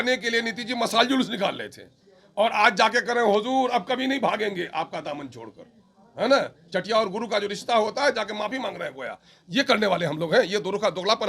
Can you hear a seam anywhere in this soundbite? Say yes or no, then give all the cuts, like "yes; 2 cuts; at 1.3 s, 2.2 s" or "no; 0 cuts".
no; 0 cuts